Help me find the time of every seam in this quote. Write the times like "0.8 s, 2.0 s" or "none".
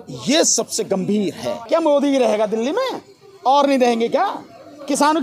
1.5 s